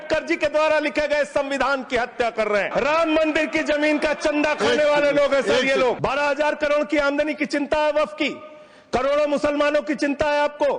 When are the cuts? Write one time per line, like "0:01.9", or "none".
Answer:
0:02.7
0:06.0